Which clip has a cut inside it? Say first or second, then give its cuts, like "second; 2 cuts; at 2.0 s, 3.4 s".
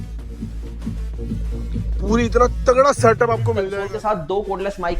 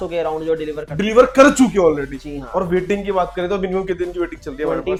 first; 1 cut; at 3.7 s